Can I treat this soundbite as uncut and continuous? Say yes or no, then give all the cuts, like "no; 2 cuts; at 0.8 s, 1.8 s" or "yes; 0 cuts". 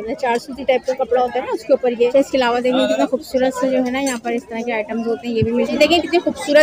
no; 2 cuts; at 2.1 s, 5.6 s